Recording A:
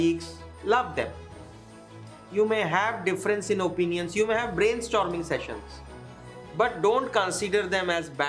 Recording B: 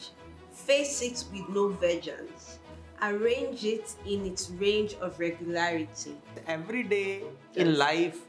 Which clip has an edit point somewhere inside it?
B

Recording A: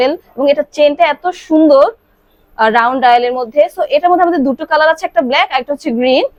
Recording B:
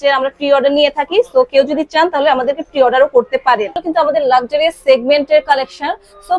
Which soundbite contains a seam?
B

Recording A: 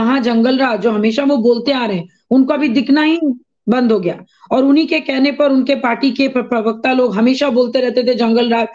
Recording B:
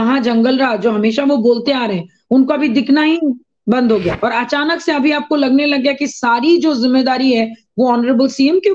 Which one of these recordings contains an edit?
B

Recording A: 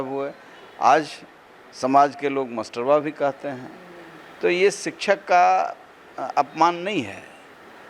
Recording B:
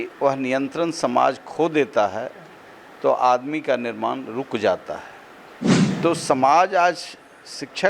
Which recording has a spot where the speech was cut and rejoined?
B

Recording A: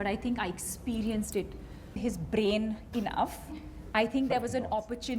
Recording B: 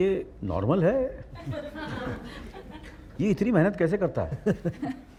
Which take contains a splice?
A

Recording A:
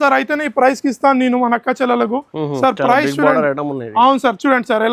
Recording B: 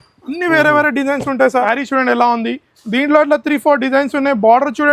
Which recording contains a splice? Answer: B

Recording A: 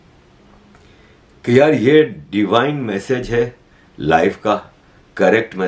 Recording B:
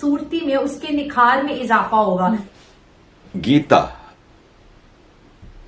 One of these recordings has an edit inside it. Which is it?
B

